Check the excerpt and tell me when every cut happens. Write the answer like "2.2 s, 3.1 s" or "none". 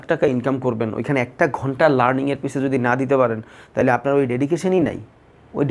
none